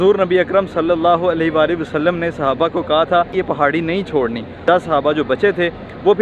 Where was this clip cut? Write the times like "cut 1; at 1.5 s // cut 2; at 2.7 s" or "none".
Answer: cut 1; at 3.3 s // cut 2; at 4.6 s